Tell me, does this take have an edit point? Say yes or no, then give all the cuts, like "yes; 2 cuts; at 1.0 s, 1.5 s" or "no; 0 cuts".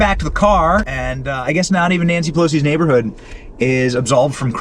yes; 1 cut; at 0.9 s